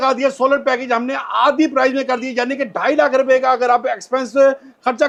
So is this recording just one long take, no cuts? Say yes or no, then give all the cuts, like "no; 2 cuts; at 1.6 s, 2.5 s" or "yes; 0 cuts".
yes; 0 cuts